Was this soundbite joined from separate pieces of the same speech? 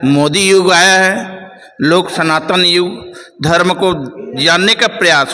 no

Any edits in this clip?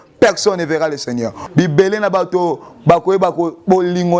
yes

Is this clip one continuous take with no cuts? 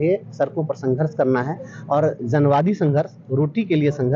yes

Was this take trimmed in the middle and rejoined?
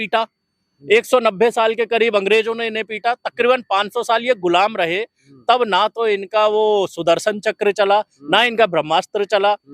no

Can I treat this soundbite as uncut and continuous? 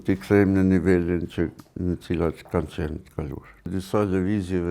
no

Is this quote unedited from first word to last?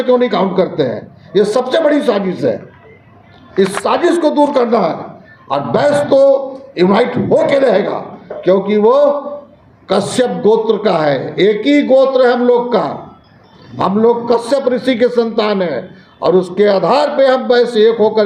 yes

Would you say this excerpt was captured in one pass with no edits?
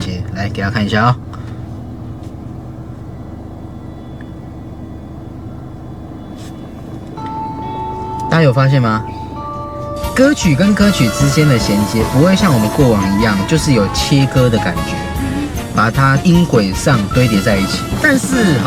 yes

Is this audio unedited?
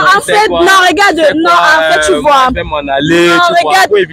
yes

